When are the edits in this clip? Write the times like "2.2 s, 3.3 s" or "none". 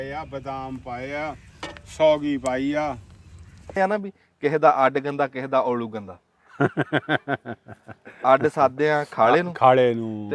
3.7 s

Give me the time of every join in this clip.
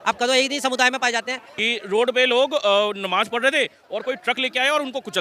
1.4 s

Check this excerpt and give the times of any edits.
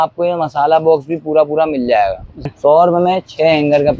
2.5 s

